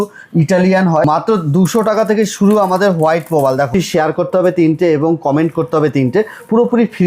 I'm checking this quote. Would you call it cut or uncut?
cut